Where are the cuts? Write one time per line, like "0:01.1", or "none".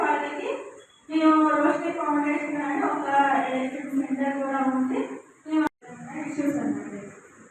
0:05.7